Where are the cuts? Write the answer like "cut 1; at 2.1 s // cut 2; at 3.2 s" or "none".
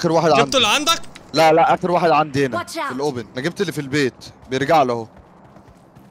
cut 1; at 3.3 s

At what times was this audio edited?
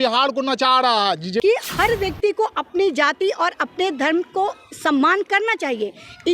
cut 1; at 1.4 s

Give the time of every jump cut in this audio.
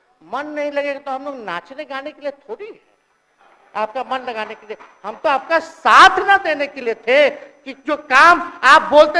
none

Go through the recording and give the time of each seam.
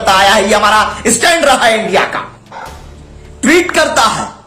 cut 1; at 2.7 s

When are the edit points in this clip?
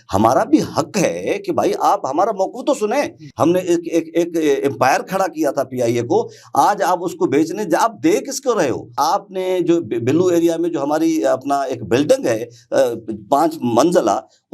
cut 1; at 3.2 s // cut 2; at 8.9 s

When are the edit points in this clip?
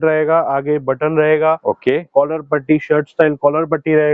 none

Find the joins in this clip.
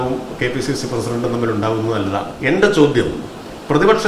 cut 1; at 2.3 s

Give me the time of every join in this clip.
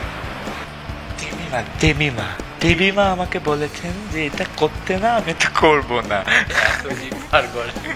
none

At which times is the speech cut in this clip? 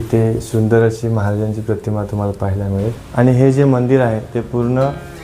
cut 1; at 3.0 s

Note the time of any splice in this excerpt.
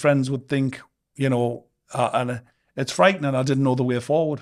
none

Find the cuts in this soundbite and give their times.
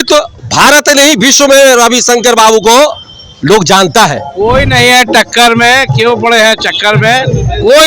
cut 1; at 4.2 s

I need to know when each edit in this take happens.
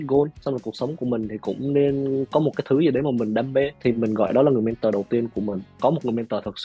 cut 1; at 3.8 s // cut 2; at 5.7 s

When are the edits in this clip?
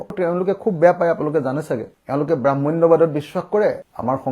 none

